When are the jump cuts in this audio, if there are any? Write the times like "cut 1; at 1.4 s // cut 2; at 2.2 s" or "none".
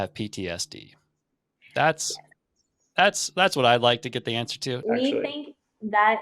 cut 1; at 4.7 s